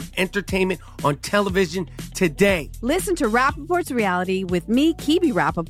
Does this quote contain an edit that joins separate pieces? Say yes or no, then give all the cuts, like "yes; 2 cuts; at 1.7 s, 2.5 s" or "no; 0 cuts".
no; 0 cuts